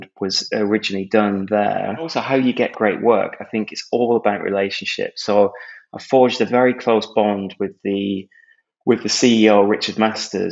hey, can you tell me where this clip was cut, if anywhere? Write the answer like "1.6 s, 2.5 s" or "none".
2.2 s

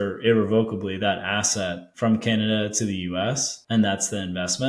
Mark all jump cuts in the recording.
1.8 s, 3.5 s

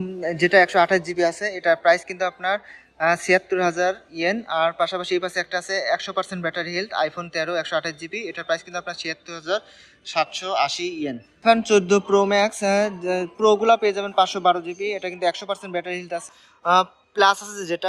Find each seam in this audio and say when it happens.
11.4 s, 16.4 s

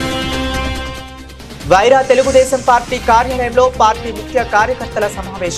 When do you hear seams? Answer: 1.6 s

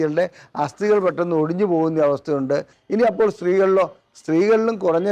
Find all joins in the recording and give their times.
2.8 s

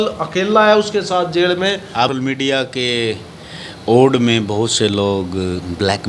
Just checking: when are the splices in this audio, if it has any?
2.0 s

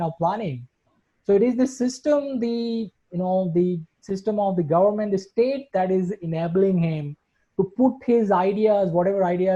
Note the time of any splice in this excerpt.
none

